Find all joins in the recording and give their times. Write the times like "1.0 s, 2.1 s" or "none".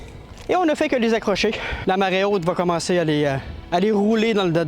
1.7 s, 3.5 s

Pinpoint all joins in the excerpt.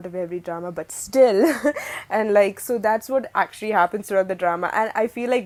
none

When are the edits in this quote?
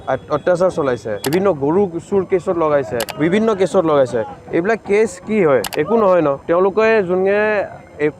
1.1 s, 3.0 s, 5.7 s, 6.4 s

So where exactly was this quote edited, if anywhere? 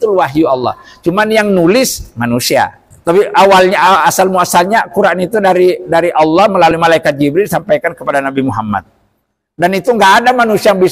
2.9 s

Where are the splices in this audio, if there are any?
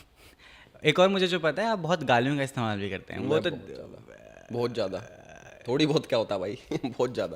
none

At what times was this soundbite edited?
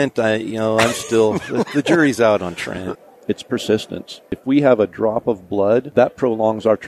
2.9 s, 4.4 s, 5.9 s

